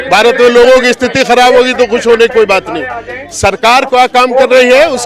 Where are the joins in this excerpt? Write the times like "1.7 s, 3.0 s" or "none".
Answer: none